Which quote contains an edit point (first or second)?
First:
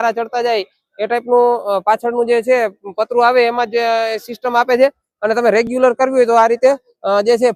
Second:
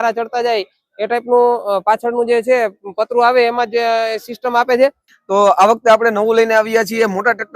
second